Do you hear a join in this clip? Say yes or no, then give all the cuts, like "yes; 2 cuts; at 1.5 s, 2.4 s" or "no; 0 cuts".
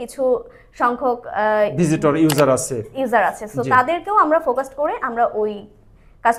no; 0 cuts